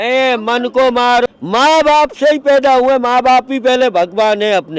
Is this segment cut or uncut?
cut